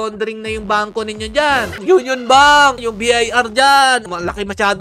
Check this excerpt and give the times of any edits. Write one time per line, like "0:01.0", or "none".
0:01.8
0:02.8
0:04.1